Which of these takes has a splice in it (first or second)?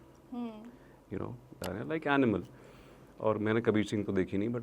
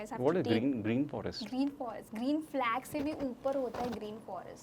first